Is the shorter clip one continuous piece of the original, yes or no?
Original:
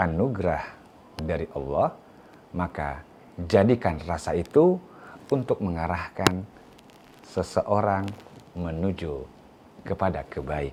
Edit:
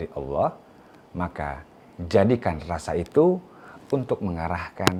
yes